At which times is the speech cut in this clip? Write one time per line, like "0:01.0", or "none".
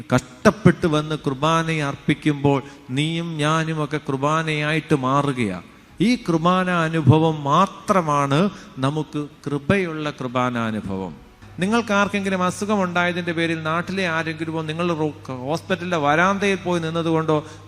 0:11.4